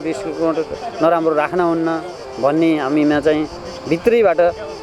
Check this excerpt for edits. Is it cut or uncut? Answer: uncut